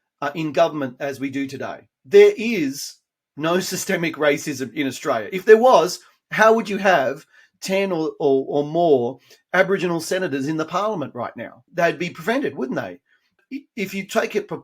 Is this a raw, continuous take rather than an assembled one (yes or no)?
no